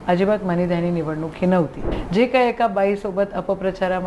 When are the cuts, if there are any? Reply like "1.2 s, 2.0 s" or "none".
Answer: 1.9 s